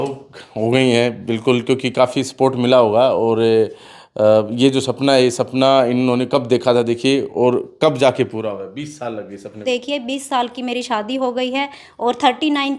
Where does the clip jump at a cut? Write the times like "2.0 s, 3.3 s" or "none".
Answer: 9.6 s